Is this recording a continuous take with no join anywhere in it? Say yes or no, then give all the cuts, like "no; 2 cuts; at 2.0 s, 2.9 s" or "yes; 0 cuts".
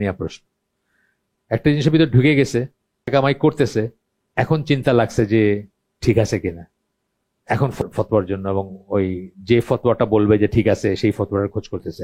no; 2 cuts; at 3.1 s, 7.8 s